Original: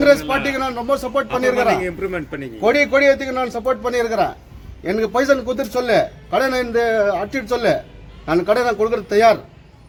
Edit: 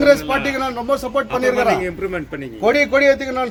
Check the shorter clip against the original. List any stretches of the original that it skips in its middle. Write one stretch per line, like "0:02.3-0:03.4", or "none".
none